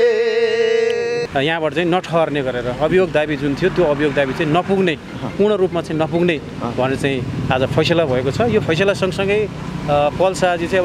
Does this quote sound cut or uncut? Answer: cut